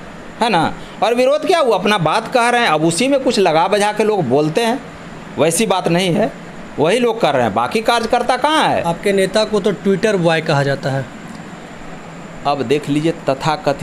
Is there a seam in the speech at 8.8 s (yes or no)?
yes